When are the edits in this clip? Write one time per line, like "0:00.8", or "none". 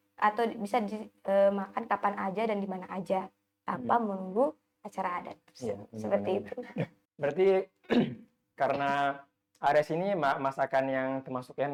none